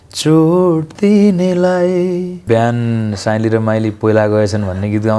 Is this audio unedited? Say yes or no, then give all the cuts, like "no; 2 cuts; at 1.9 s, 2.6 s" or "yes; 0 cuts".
no; 1 cut; at 2.4 s